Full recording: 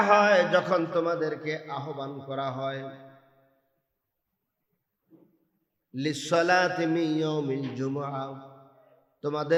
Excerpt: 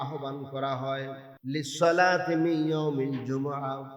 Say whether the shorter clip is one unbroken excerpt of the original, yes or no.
no